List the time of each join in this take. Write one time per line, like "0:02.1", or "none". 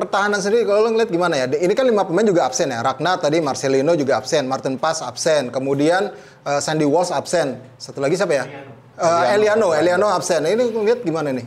none